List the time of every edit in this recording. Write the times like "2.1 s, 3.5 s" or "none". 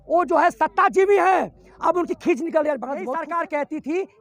3.2 s